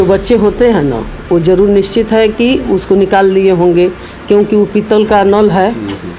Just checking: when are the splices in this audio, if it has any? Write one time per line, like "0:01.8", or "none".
none